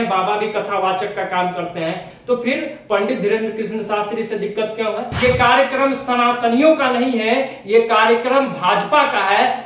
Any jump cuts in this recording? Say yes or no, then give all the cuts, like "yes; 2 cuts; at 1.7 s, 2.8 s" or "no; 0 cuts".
yes; 1 cut; at 5.1 s